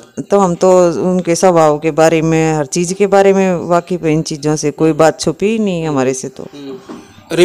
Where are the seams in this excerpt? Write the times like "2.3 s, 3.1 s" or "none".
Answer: none